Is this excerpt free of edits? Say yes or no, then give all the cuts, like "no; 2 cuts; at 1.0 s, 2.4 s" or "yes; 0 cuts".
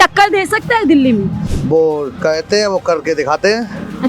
no; 1 cut; at 1.4 s